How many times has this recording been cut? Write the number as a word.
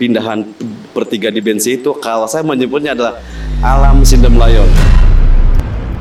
zero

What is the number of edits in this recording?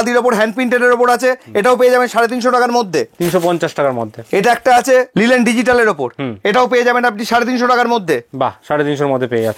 zero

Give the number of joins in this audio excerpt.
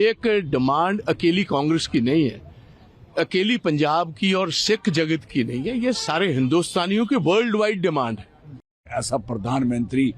one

